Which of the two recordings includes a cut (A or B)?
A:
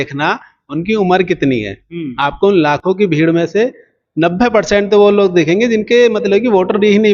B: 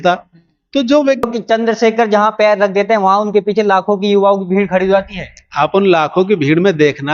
B